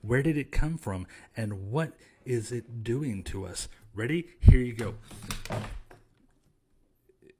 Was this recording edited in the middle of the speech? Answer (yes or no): no